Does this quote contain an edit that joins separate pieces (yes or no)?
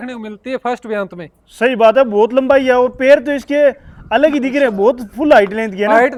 no